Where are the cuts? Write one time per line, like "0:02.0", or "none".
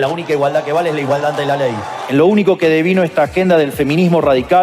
0:02.0